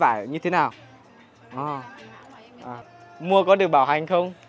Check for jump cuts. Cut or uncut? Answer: cut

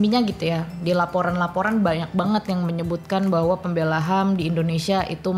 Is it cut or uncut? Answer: uncut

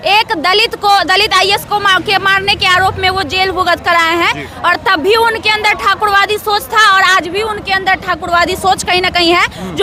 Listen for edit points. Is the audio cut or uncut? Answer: uncut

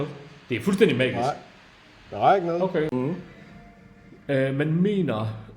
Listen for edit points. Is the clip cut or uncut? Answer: cut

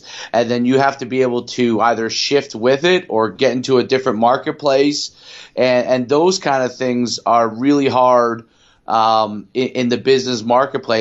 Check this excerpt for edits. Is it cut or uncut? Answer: uncut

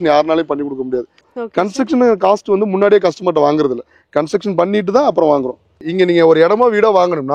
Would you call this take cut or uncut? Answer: cut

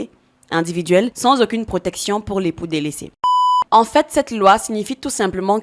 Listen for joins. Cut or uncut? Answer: cut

